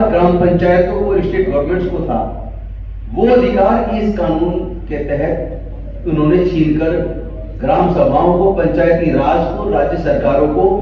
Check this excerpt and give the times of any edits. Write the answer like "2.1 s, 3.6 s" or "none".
none

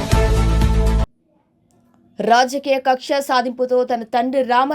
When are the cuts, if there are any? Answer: none

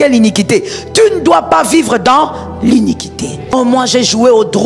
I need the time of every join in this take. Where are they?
3.5 s

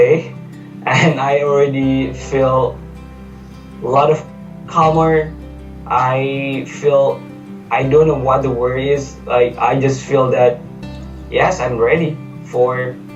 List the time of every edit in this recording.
none

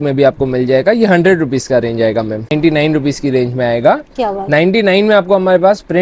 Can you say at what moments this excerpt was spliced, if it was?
2.5 s

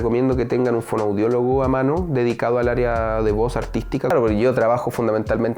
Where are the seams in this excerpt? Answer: 4.1 s

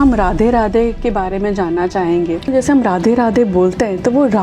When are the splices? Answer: 2.5 s

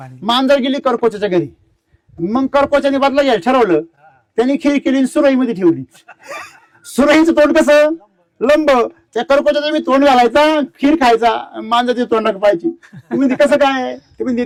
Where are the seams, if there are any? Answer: none

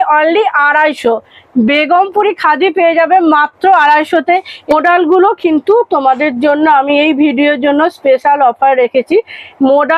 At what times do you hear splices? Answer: 4.7 s

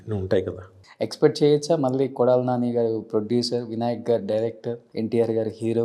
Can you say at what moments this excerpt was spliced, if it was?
0.8 s, 4.8 s

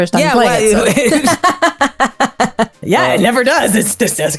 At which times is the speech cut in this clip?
2.8 s

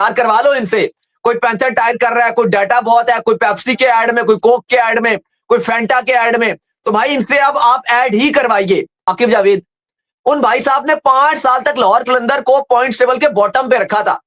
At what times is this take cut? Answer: 9.1 s

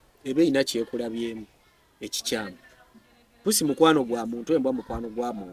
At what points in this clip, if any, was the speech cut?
none

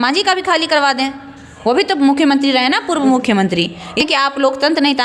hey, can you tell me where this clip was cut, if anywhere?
4.0 s

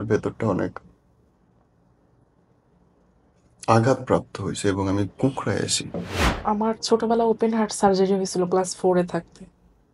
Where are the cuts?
6.4 s

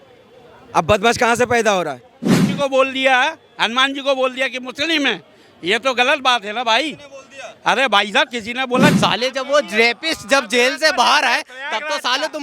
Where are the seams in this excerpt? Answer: 2.3 s, 8.9 s

